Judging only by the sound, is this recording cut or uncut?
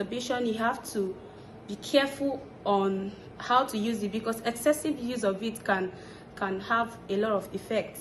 uncut